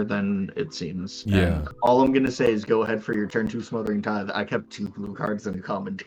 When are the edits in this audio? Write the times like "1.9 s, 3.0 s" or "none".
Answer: 1.6 s